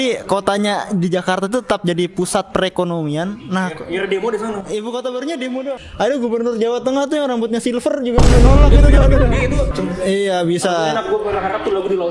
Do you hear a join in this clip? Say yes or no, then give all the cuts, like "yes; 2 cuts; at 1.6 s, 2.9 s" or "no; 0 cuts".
yes; 2 cuts; at 5.7 s, 9.7 s